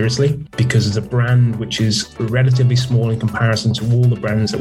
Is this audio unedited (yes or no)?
yes